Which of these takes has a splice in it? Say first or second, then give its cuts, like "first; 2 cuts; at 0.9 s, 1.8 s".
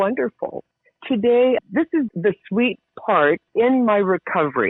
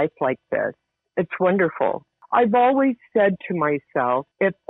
second; 1 cut; at 2.2 s